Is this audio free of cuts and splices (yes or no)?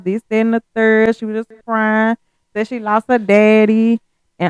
yes